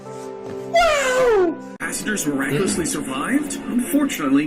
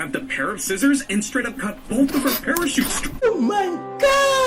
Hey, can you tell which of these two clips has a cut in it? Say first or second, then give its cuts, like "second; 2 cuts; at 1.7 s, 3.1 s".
first; 1 cut; at 1.8 s